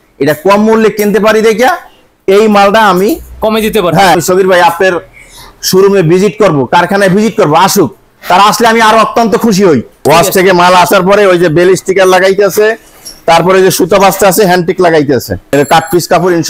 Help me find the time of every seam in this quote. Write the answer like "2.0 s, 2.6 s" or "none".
4.1 s, 10.0 s, 15.5 s